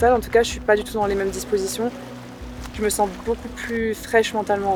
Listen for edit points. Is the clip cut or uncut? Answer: uncut